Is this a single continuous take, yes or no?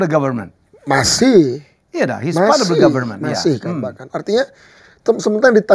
yes